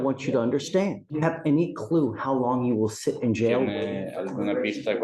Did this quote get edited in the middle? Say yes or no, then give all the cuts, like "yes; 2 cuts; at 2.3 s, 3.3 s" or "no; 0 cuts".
yes; 1 cut; at 1.0 s